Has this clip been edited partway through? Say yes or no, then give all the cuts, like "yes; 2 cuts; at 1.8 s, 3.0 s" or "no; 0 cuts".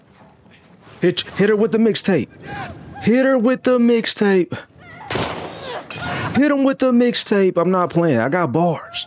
no; 0 cuts